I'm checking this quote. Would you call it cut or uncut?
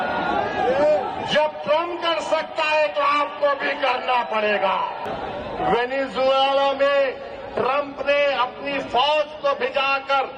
cut